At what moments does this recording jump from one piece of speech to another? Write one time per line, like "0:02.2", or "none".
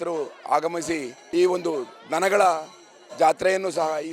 0:01.2